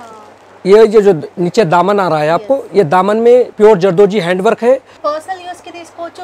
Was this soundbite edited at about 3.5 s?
yes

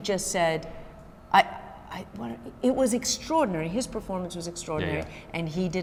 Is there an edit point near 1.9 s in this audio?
no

